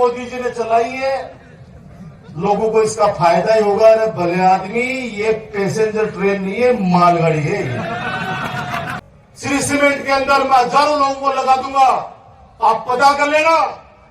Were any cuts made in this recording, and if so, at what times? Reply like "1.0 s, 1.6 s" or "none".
9.0 s